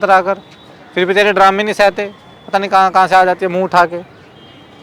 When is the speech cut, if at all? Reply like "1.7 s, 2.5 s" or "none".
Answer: none